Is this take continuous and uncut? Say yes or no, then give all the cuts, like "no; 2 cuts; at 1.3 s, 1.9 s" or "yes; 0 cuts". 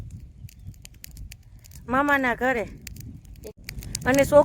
no; 1 cut; at 3.5 s